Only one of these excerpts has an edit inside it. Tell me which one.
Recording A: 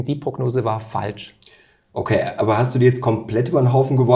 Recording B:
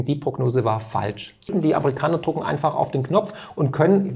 B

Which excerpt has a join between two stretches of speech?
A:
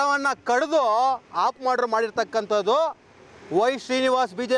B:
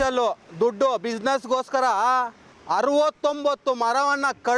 B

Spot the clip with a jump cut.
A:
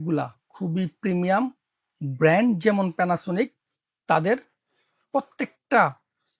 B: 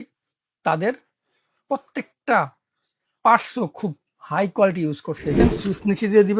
B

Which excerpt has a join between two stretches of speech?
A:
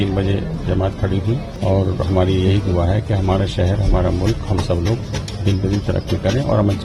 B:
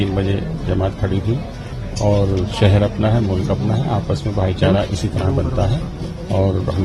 A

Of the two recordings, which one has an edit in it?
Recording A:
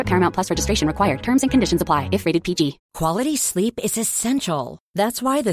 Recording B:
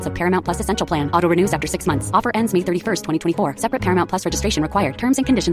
A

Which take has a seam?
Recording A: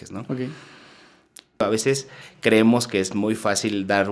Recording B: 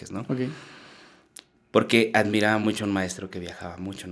A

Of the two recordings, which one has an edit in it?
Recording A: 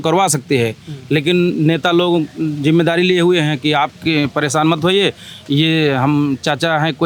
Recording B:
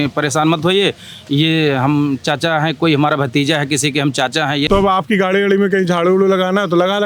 B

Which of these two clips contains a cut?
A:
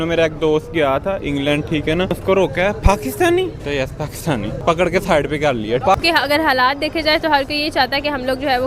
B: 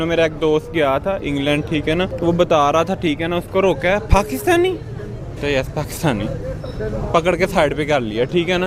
A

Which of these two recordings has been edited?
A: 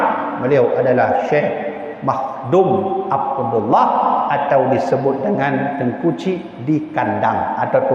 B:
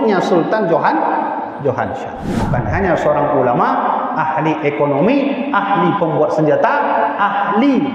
B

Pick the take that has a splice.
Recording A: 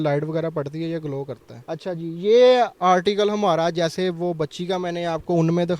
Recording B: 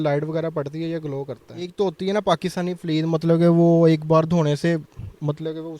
B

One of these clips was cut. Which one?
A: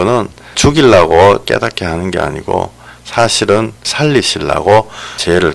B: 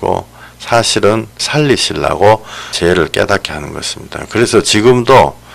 A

